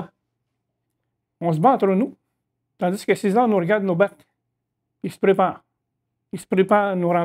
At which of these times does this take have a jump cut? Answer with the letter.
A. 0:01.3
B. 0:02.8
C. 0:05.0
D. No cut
D